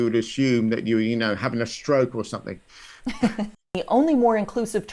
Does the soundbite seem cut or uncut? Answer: cut